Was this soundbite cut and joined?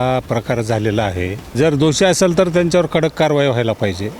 yes; 1 cut; at 1.5 s

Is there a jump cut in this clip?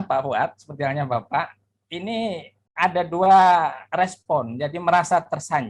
no; 0 cuts

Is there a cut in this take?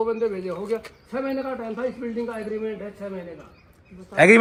no; 0 cuts

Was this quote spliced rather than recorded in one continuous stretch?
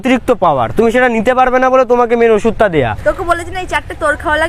yes; 1 cut; at 3.0 s

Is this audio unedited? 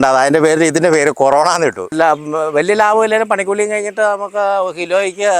no; 1 cut; at 1.9 s

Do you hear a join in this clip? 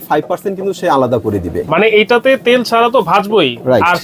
no; 0 cuts

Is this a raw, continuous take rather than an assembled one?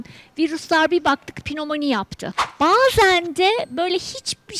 no; 1 cut; at 2.5 s

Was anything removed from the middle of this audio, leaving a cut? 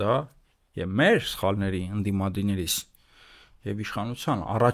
no; 0 cuts

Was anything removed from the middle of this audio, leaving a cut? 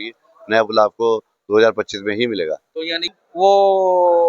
yes; 1 cut; at 3.1 s

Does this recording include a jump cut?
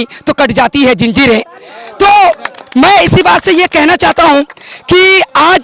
no; 0 cuts

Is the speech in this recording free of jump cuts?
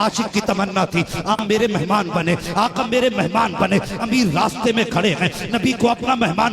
no; 1 cut; at 1.4 s

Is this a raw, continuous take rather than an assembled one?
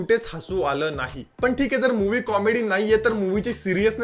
no; 1 cut; at 1.3 s

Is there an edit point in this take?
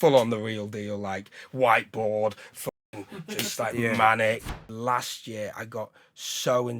yes; 1 cut; at 4.5 s

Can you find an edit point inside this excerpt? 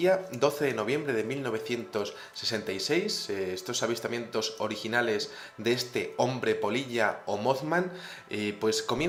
no; 0 cuts

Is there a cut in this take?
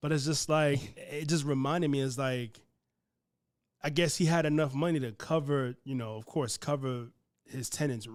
no; 0 cuts

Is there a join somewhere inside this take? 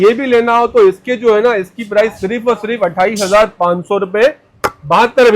no; 0 cuts

